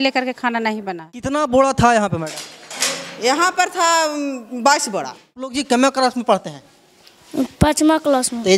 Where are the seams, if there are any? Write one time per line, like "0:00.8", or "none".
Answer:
0:01.3
0:05.6